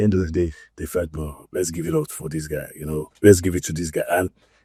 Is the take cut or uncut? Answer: uncut